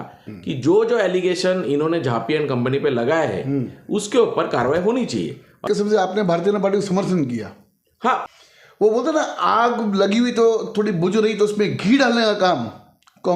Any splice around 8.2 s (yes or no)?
yes